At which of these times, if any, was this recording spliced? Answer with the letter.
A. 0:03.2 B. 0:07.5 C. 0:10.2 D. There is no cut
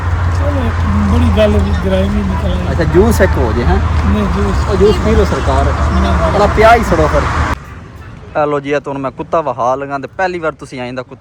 B